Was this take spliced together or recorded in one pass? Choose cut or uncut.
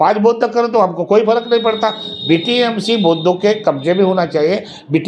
uncut